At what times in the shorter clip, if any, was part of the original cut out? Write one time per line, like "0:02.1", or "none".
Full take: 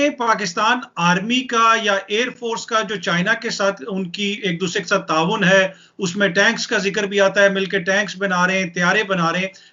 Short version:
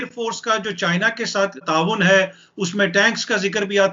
0:01.6